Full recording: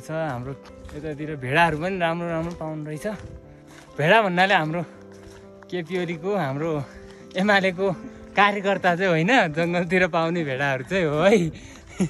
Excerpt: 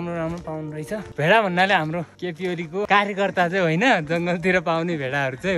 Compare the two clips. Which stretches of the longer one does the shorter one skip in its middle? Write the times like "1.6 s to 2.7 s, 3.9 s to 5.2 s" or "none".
3.2 s to 3.9 s, 5.5 s to 8.1 s